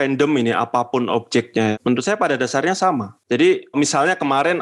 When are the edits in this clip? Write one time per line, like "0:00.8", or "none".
0:01.7